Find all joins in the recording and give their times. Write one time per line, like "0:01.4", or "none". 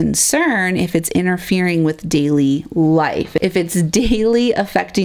none